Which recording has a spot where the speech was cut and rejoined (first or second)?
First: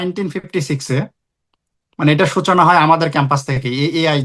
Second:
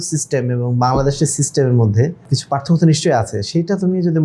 second